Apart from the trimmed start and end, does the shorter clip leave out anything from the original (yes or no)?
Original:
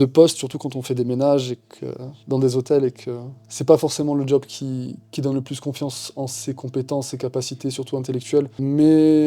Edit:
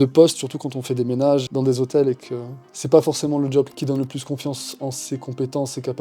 yes